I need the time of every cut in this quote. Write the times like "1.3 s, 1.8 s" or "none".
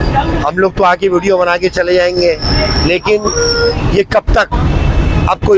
none

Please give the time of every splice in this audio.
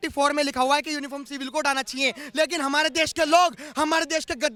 none

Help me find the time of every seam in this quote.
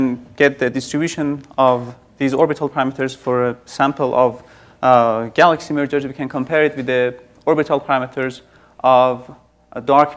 6.3 s

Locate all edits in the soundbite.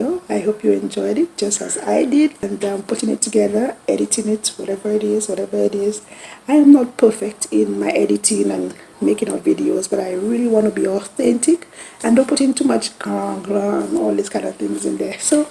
2.5 s

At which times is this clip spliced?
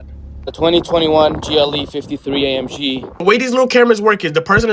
3.2 s

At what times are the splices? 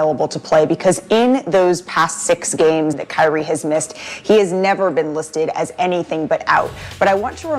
3.0 s

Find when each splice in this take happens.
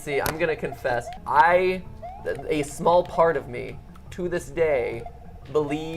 1.2 s

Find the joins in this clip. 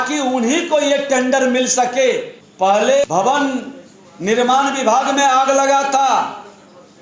2.4 s, 3.1 s

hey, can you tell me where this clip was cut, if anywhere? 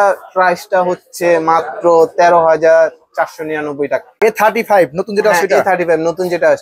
4.2 s

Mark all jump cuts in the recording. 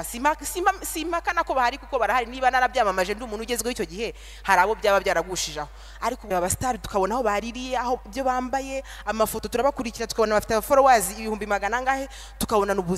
6.3 s

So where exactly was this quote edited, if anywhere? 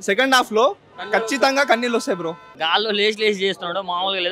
2.4 s

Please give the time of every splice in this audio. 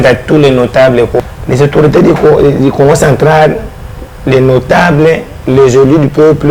1.2 s

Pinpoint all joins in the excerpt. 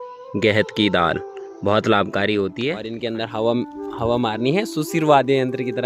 2.8 s

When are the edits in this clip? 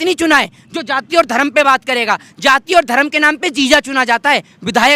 none

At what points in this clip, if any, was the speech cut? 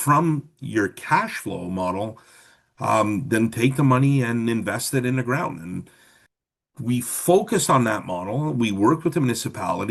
none

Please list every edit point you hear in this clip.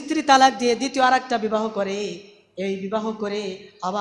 none

